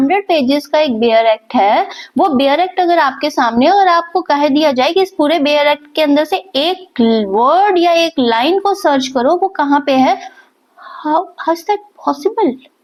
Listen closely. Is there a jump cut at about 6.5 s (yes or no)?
no